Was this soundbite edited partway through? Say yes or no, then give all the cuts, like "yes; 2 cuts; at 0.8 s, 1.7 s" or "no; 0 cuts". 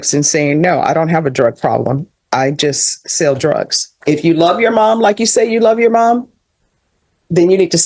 yes; 1 cut; at 4.0 s